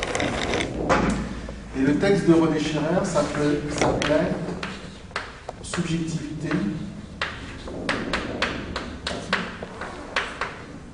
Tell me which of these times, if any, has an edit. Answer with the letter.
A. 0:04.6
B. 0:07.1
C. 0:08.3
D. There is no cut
A